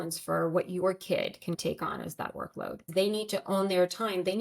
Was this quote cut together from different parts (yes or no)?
yes